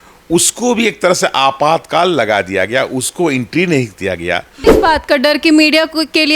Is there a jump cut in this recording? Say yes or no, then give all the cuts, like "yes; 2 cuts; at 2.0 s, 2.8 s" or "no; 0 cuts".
yes; 1 cut; at 4.6 s